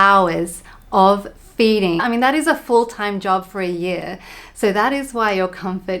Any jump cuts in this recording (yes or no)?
yes